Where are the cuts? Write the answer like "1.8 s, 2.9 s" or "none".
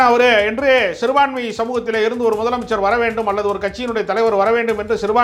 none